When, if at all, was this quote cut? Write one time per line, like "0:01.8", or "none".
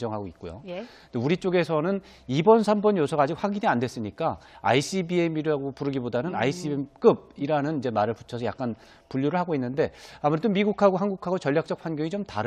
0:03.1